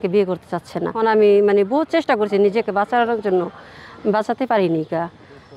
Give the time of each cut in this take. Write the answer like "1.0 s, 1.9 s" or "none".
0.9 s